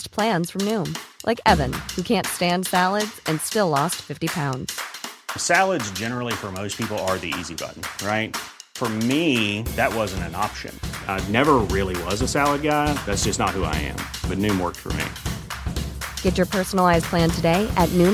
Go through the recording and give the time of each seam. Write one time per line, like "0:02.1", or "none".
none